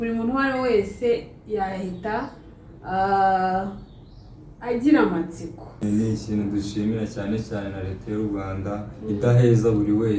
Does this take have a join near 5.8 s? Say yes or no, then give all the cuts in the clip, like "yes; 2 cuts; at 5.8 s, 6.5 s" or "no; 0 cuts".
yes; 1 cut; at 5.8 s